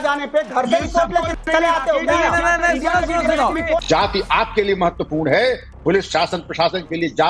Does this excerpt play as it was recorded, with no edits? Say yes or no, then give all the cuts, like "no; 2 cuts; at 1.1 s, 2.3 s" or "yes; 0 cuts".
no; 2 cuts; at 2.5 s, 3.8 s